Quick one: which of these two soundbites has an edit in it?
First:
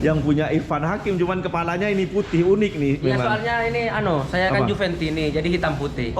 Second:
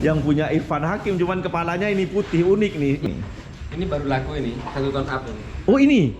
second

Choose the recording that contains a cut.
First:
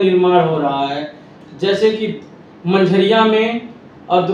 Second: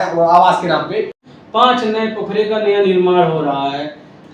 second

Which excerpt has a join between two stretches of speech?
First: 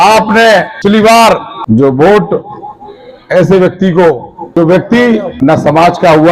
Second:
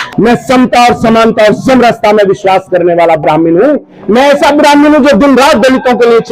first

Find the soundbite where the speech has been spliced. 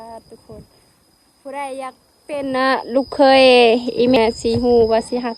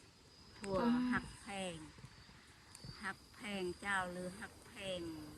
first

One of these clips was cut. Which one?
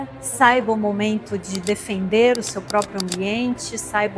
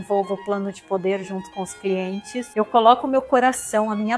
second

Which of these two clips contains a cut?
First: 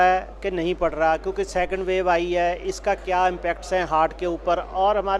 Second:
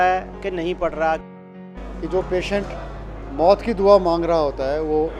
second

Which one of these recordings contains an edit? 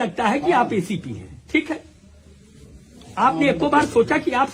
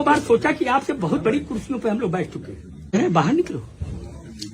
second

